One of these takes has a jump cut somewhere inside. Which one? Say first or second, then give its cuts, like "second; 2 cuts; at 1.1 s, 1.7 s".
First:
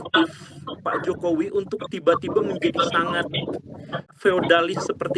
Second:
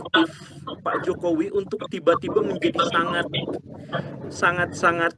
first; 1 cut; at 4.2 s